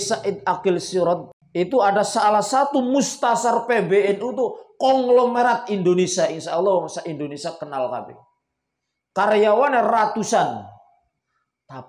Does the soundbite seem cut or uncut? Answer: cut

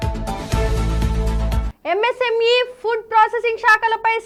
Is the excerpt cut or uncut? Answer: uncut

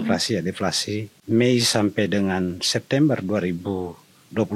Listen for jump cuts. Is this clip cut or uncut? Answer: cut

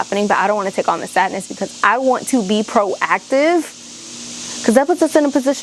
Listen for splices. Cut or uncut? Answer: uncut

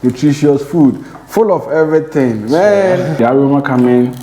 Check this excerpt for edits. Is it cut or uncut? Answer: cut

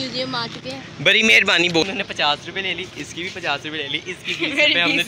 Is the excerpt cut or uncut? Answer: cut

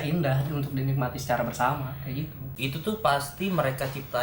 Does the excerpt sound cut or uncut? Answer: cut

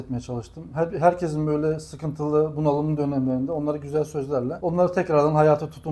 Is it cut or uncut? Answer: cut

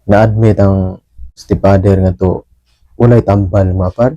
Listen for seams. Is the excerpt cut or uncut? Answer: cut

